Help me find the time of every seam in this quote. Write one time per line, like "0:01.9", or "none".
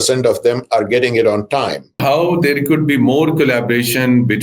0:02.0